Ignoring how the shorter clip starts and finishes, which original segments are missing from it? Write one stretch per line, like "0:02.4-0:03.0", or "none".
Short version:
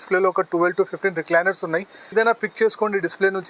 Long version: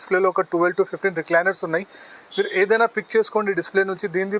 0:02.1-0:02.7